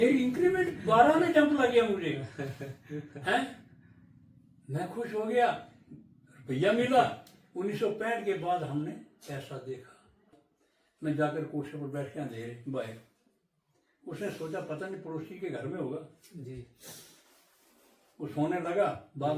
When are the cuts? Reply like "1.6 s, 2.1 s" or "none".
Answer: 10.3 s